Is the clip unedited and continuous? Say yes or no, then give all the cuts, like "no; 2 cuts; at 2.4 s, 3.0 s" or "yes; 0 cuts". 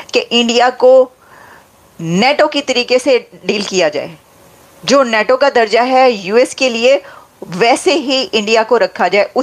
yes; 0 cuts